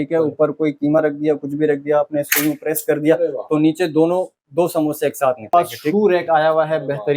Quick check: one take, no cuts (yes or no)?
no